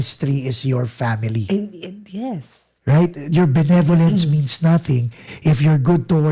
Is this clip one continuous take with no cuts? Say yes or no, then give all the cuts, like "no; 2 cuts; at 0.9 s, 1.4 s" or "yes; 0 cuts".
yes; 0 cuts